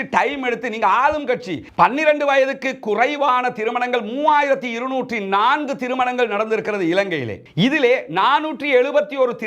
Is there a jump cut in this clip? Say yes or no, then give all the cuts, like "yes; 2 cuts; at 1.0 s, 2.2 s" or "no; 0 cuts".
yes; 1 cut; at 1.7 s